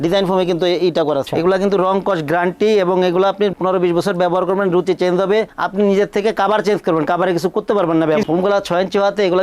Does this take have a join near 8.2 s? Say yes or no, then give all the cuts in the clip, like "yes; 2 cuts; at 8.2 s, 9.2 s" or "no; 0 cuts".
yes; 2 cuts; at 1.3 s, 8.2 s